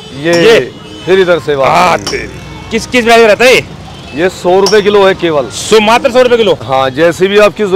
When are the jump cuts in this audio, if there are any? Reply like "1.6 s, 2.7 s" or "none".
6.6 s